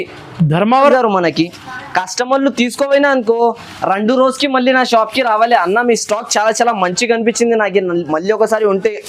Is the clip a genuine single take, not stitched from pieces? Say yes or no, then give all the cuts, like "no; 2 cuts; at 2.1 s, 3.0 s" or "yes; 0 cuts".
no; 1 cut; at 0.9 s